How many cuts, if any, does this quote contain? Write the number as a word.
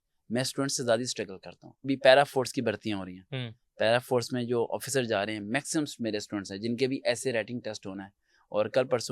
one